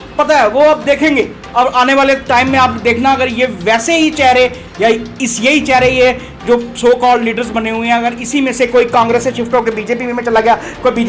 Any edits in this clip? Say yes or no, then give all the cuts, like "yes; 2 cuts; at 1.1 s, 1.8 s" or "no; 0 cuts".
no; 0 cuts